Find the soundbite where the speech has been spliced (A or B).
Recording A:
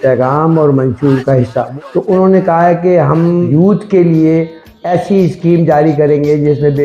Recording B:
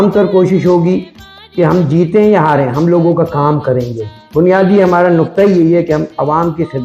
A